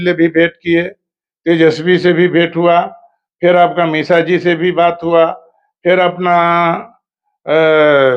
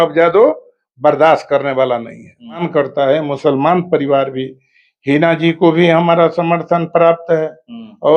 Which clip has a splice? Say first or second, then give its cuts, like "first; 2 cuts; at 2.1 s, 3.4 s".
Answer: second; 1 cut; at 2.6 s